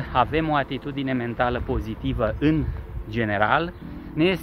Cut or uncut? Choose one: uncut